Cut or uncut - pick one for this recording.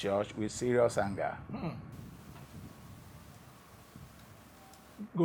uncut